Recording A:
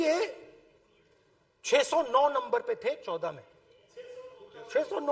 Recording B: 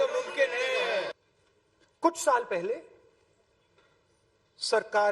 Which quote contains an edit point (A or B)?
B